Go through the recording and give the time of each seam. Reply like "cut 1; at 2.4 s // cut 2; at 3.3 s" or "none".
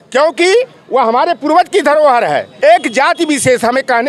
cut 1; at 2.5 s